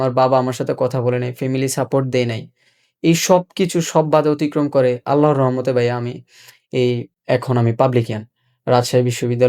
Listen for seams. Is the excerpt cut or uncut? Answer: cut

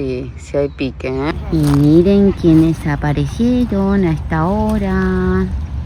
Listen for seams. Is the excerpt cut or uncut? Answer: uncut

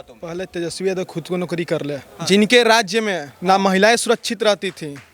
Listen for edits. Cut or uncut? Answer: cut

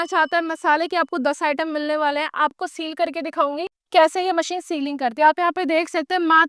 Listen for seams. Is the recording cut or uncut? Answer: cut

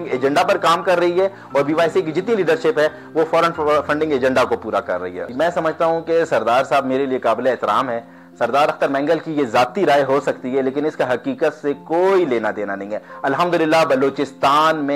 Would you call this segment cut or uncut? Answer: uncut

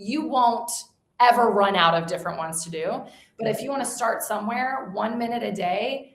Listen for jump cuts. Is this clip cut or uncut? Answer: uncut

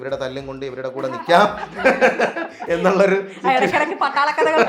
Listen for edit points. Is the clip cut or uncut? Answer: uncut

